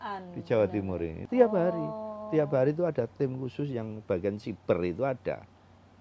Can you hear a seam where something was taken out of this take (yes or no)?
yes